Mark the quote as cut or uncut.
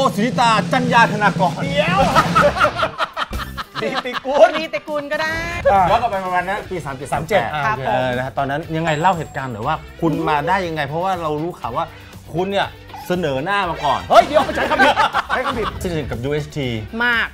cut